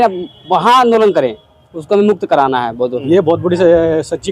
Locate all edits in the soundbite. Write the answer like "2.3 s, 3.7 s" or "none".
2.9 s